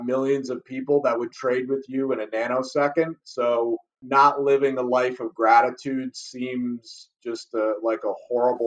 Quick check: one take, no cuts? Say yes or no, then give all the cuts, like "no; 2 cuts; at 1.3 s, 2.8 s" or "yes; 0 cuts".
no; 1 cut; at 4.0 s